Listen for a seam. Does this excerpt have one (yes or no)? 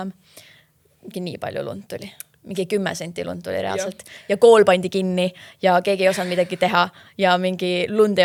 no